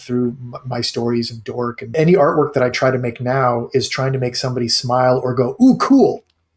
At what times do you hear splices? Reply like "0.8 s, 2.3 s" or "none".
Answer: 1.9 s

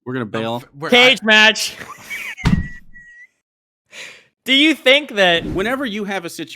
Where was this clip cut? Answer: 5.5 s

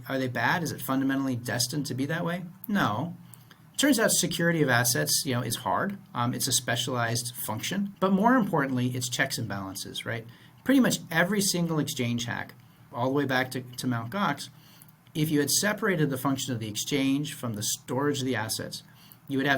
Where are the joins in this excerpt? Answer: 7.9 s, 12.8 s

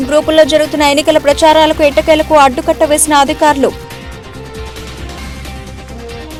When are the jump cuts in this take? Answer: none

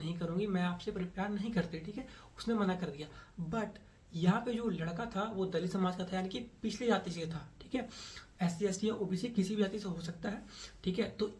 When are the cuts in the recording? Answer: none

